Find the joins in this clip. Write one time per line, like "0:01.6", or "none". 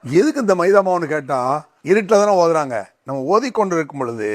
0:01.7